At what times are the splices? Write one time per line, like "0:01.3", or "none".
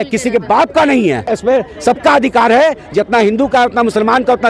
0:01.3

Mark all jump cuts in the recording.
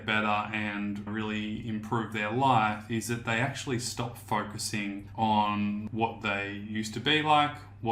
0:05.0
0:05.9

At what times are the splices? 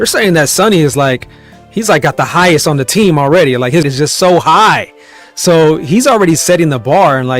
0:03.9

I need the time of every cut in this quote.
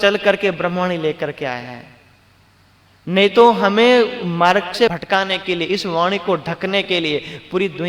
0:04.9

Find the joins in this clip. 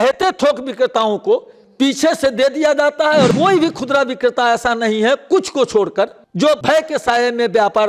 0:03.3
0:06.6

